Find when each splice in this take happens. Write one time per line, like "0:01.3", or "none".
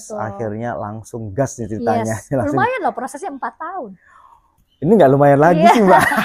none